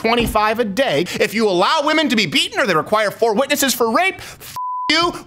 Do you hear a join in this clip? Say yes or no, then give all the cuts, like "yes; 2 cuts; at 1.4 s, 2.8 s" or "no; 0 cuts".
yes; 1 cut; at 1.1 s